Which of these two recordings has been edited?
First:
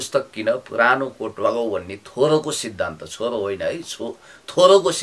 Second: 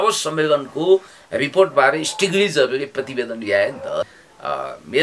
second; 1 cut; at 4.1 s

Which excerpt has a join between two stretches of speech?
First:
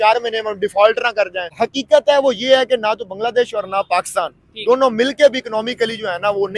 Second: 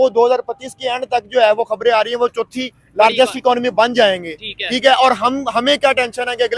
first; 1 cut; at 1.4 s

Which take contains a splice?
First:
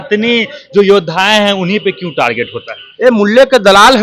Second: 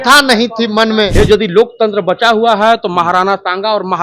second; 1 cut; at 1.1 s

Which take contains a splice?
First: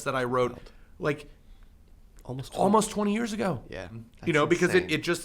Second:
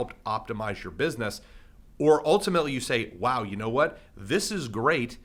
first; 1 cut; at 4.1 s

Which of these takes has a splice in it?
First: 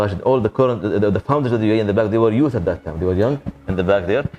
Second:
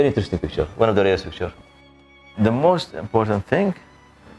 second; 1 cut; at 2.2 s

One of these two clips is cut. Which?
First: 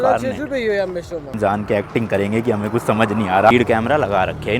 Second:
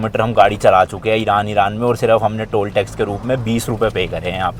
first; 2 cuts; at 1.3 s, 3.5 s

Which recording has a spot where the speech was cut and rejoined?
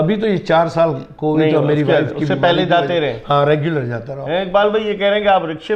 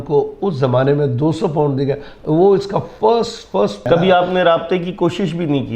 second; 1 cut; at 3.8 s

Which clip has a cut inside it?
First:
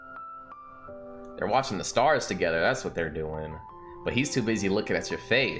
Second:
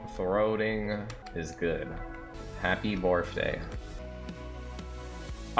second; 3 cuts; at 1.2 s, 2.3 s, 4.0 s

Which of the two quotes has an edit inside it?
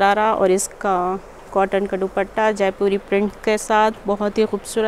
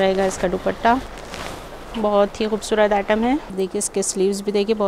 second; 1 cut; at 3.5 s

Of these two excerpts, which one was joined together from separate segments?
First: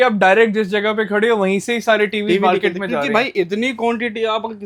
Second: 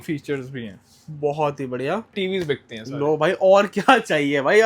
second; 1 cut; at 2.2 s

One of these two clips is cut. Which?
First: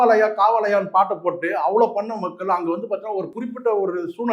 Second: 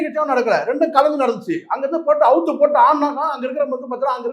first; 1 cut; at 3.3 s

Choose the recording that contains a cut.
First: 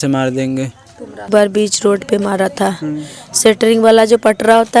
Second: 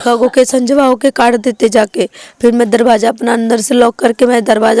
first; 1 cut; at 1.3 s

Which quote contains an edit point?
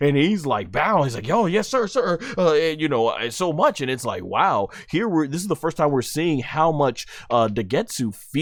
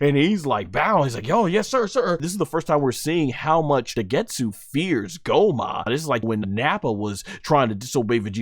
second; 3 cuts; at 2.3 s, 3.9 s, 6.3 s

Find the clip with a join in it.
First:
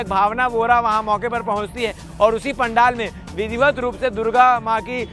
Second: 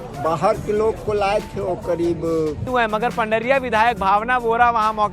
second; 1 cut; at 2.7 s

